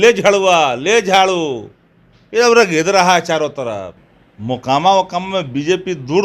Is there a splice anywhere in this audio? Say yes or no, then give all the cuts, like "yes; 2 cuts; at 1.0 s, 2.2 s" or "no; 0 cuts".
yes; 1 cut; at 4.0 s